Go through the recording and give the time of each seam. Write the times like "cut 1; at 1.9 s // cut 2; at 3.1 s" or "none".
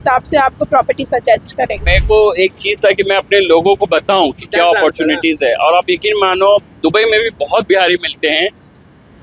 cut 1; at 1.8 s